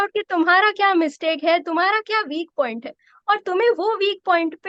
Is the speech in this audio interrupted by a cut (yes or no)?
no